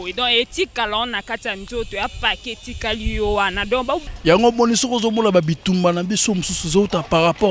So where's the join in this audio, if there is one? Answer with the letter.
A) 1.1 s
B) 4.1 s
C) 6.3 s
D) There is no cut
B